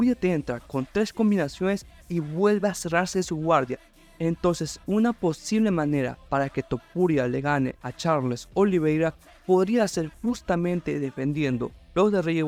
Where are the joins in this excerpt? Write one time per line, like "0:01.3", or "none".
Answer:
none